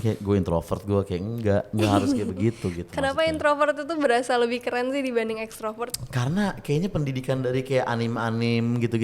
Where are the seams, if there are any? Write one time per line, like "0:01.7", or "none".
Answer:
none